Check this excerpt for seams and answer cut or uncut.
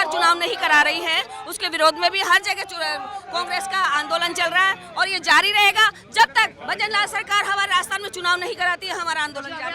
uncut